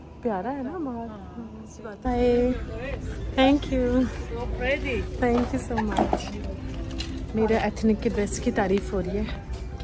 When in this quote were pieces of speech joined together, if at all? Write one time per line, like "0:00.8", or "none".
0:02.0